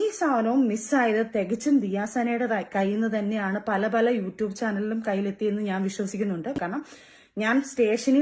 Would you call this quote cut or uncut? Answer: uncut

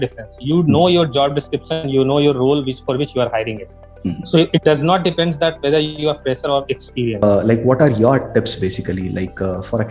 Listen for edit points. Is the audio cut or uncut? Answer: cut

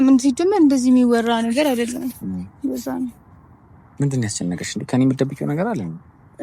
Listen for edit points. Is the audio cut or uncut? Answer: uncut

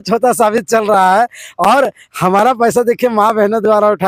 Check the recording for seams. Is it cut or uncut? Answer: uncut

